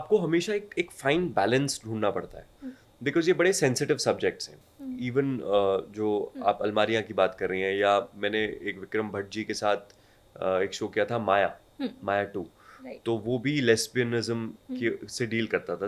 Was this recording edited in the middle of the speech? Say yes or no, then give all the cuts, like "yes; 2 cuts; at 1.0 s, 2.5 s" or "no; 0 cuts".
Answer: no; 0 cuts